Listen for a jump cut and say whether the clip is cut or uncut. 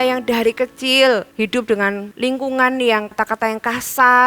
cut